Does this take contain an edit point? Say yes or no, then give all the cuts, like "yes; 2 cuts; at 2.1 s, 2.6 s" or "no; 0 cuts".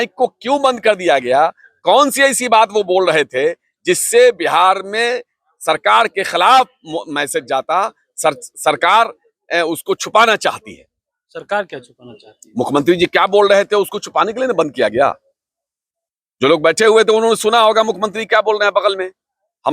no; 0 cuts